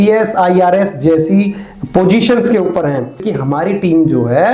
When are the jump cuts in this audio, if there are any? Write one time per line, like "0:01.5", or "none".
0:03.2

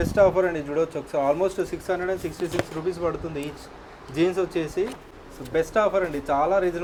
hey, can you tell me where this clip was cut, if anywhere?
none

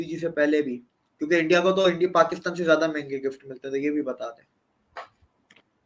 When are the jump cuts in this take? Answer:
none

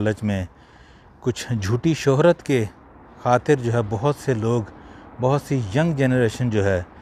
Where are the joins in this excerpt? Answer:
none

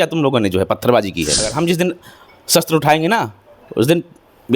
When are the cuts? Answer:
0:01.5

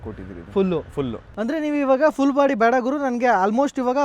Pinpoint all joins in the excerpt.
0:01.2

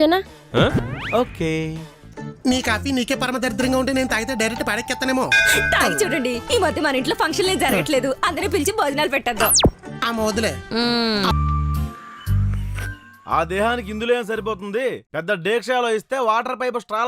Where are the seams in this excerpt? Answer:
0:02.2
0:11.3

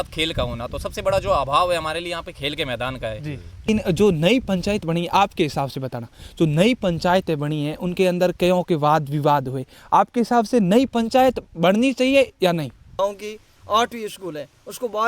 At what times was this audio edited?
0:03.7
0:13.0

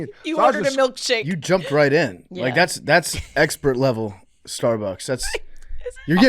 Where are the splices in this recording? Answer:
0:01.3

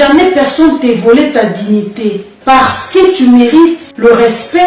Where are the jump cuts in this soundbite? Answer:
0:02.3

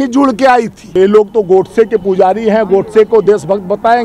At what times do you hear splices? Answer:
0:00.9

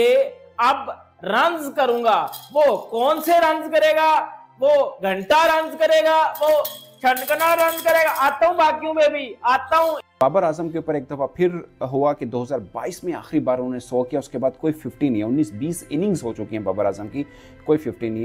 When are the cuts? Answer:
0:10.1

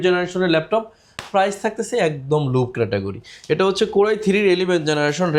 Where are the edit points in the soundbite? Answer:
none

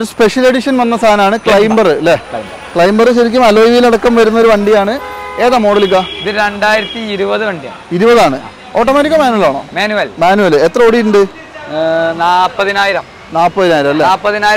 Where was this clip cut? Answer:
none

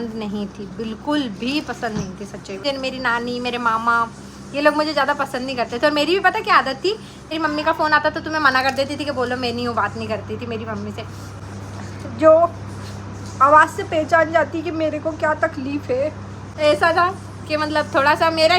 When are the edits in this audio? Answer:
0:02.6
0:07.3
0:11.4
0:16.4

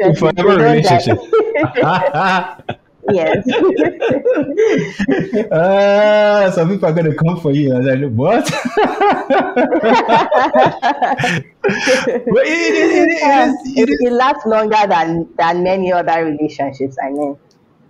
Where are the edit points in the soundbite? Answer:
none

